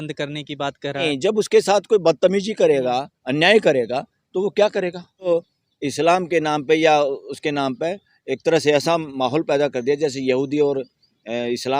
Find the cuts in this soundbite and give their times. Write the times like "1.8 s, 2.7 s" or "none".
1.0 s, 5.3 s

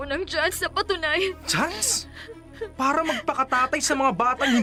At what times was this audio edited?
none

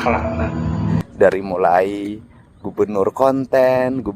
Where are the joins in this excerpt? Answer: 1.0 s

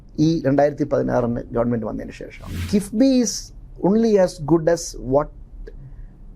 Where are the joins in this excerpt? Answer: 2.6 s

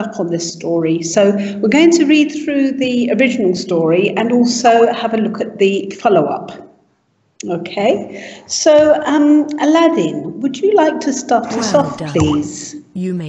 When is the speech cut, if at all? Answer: 12.2 s

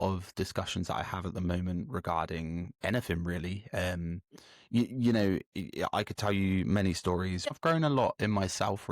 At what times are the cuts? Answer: 7.5 s

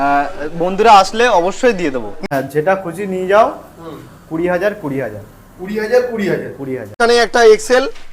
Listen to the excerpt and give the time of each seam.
2.2 s, 6.9 s

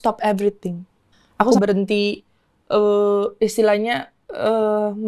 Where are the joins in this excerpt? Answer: 1.5 s

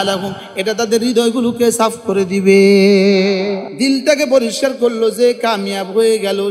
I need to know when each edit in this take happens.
3.7 s

